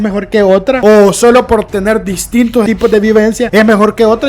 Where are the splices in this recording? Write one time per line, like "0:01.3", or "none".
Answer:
0:00.8
0:02.7
0:03.4